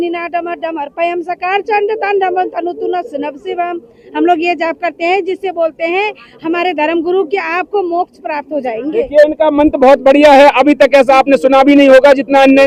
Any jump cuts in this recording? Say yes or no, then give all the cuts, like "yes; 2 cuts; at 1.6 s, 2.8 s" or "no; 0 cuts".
no; 0 cuts